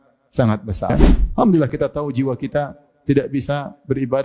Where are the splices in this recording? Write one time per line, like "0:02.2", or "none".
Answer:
0:00.9